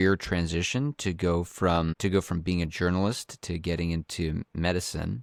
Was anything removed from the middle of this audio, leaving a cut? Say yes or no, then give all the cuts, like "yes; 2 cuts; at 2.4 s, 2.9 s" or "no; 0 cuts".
no; 0 cuts